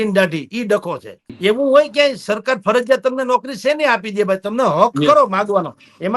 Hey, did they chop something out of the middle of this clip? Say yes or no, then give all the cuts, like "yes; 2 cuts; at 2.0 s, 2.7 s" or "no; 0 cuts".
yes; 1 cut; at 1.3 s